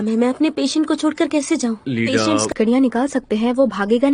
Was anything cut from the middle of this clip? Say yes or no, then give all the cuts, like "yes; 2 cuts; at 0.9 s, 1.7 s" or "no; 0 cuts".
yes; 1 cut; at 2.5 s